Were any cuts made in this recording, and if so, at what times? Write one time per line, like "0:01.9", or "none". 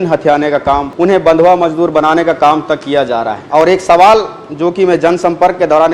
0:00.9
0:03.4